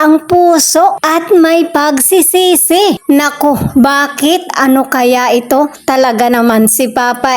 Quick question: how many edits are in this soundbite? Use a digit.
1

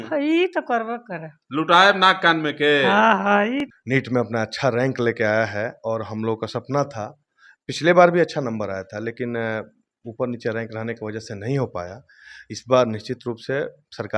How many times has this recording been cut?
1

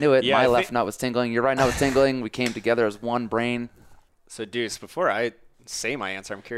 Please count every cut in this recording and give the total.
1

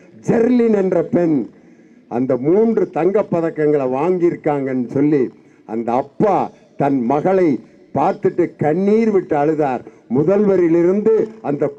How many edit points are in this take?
0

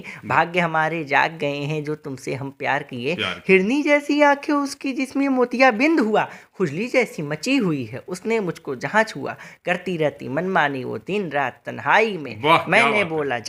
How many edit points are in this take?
0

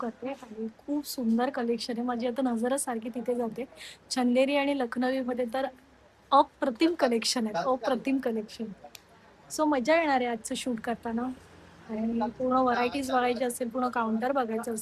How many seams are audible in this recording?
0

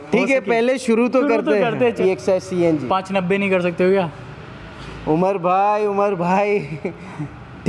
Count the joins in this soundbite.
1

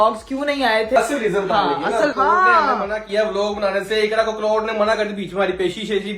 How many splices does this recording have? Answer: 2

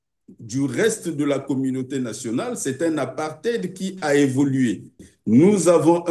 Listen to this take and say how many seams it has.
1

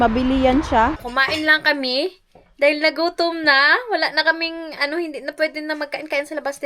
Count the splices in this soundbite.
1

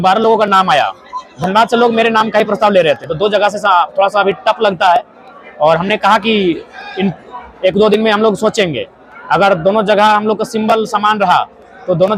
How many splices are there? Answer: 0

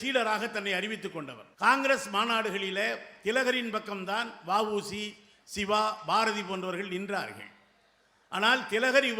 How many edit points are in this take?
1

